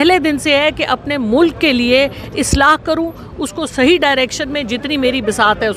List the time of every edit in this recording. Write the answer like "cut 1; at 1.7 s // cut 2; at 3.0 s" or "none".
none